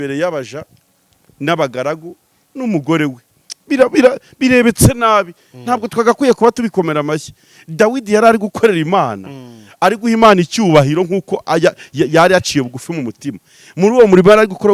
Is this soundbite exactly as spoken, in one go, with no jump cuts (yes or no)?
yes